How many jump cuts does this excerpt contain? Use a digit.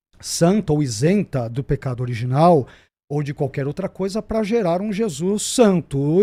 0